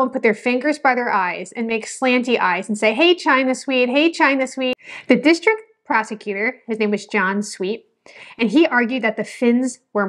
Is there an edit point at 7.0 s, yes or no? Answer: no